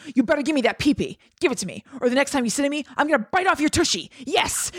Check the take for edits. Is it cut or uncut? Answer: uncut